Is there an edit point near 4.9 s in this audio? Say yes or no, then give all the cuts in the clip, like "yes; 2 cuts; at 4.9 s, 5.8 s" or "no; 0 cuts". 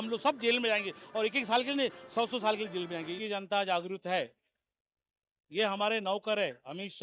no; 1 cut; at 3.2 s